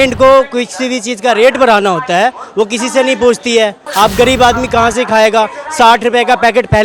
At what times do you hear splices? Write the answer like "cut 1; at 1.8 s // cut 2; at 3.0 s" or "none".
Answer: cut 1; at 3.8 s